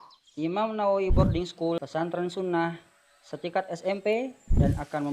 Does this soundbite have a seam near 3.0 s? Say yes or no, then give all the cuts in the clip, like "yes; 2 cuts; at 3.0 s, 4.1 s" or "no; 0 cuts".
no; 1 cut; at 1.8 s